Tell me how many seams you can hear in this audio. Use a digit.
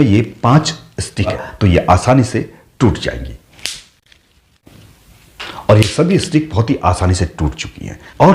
2